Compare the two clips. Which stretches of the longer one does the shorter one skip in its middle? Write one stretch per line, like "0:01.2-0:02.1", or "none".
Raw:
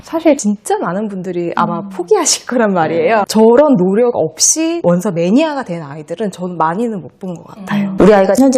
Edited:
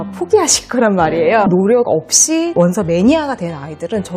0:03.3-0:03.8